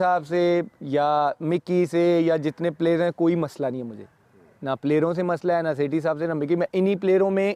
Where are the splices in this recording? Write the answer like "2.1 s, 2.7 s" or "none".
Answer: none